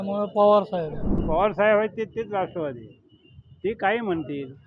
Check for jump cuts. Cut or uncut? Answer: cut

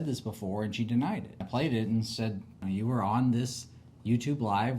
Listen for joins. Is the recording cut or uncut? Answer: cut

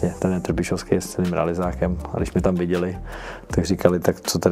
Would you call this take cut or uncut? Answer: uncut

